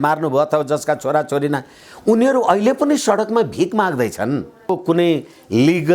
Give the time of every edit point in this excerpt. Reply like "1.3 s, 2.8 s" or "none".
4.8 s